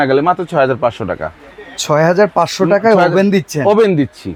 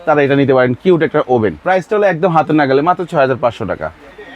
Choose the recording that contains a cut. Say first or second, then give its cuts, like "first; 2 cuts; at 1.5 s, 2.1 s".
second; 1 cut; at 1.6 s